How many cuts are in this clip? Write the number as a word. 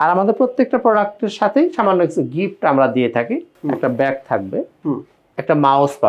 one